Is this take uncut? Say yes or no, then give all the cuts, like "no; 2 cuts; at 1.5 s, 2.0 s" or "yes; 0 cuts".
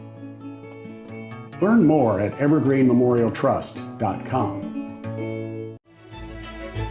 no; 1 cut; at 5.9 s